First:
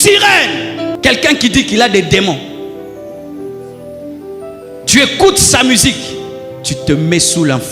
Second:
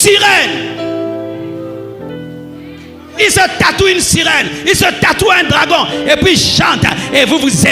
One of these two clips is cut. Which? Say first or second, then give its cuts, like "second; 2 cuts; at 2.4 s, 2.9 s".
first; 1 cut; at 0.9 s